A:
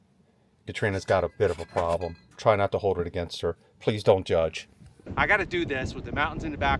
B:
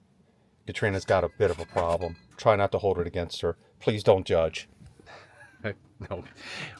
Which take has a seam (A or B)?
A